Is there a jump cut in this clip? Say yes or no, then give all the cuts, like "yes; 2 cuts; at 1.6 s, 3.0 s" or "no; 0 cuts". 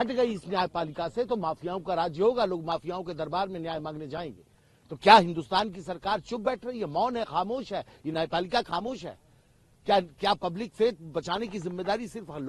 no; 0 cuts